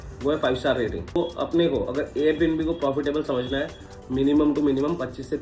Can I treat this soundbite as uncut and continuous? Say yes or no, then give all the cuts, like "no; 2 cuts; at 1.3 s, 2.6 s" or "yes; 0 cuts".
no; 2 cuts; at 1.2 s, 3.9 s